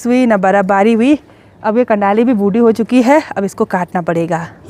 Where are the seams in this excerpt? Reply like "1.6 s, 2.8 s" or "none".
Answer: none